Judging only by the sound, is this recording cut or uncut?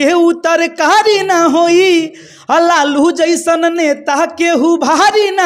uncut